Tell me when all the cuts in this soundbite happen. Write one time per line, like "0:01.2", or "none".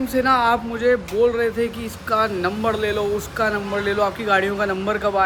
none